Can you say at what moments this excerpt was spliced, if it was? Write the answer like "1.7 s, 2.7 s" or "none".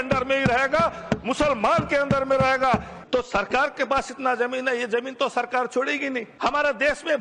2.9 s, 6.3 s